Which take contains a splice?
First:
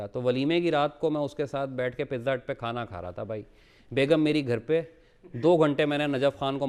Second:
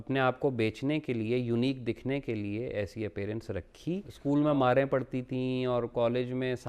second; 1 cut; at 4.1 s

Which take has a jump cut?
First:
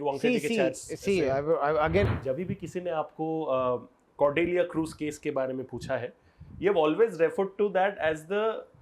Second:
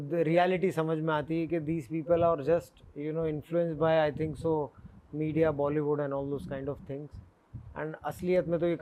first; 1 cut; at 2.1 s

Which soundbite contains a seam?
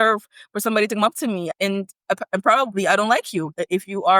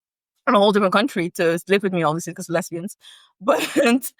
first; 1 cut; at 1.5 s

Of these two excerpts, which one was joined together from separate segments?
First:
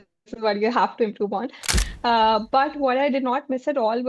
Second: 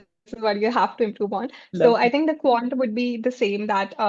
first; 1 cut; at 1.7 s

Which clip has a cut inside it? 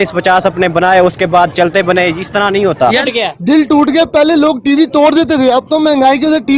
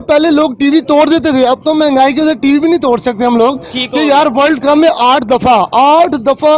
first; 1 cut; at 3.0 s

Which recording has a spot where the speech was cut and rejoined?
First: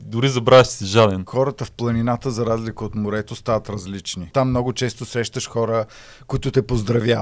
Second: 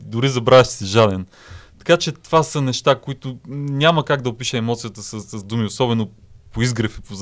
first; 2 cuts; at 1.2 s, 4.3 s

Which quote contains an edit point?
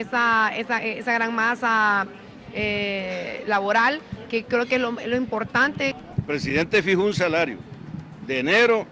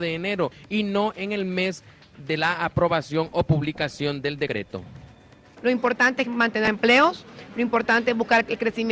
second; 1 cut; at 6.4 s

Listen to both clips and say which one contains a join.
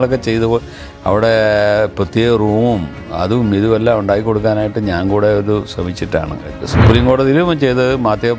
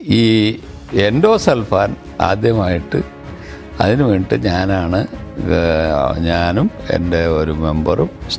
first; 1 cut; at 6.6 s

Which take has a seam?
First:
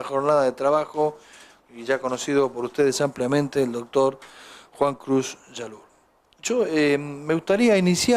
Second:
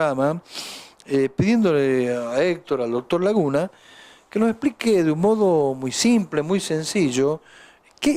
first; 1 cut; at 2.5 s

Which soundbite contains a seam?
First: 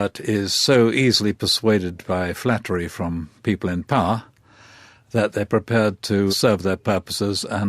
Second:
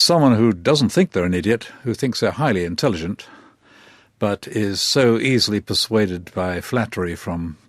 first; 1 cut; at 6.3 s

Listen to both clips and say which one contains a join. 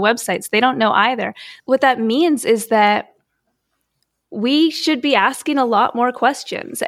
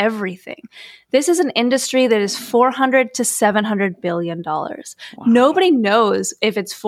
first; 1 cut; at 1.5 s

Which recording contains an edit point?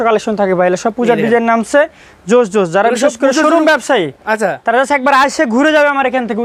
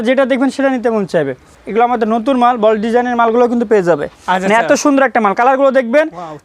second; 2 cuts; at 1.6 s, 4.1 s

